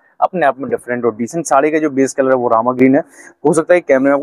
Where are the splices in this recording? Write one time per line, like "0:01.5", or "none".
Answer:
none